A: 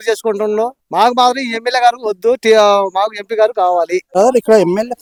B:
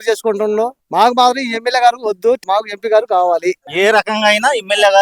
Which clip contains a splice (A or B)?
B